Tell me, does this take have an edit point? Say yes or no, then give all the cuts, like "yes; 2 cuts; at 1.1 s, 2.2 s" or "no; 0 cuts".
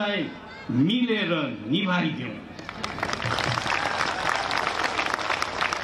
no; 0 cuts